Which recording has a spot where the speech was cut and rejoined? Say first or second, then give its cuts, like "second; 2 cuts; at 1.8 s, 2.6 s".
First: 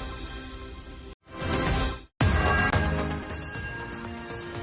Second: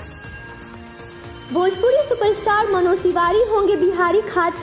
first; 1 cut; at 0.9 s